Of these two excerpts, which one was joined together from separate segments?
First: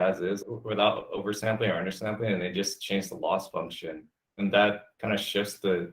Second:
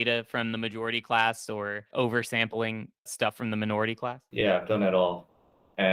second; 1 cut; at 4.2 s

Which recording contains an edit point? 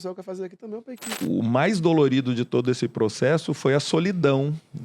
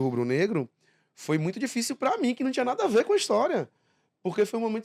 first; 1 cut; at 1.2 s

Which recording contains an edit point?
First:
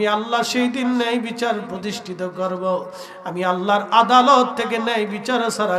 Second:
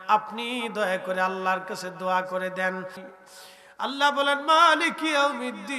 second; 1 cut; at 3.1 s

